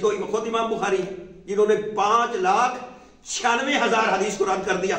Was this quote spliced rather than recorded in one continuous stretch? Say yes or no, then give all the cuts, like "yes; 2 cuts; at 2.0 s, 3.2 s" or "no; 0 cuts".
no; 0 cuts